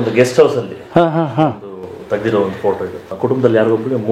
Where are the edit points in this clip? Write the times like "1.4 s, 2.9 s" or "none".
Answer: 3.1 s